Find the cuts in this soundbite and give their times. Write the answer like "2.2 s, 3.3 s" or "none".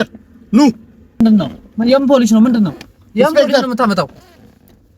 1.2 s